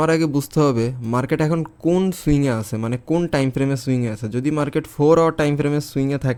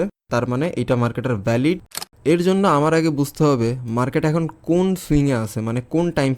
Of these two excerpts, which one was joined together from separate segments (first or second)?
second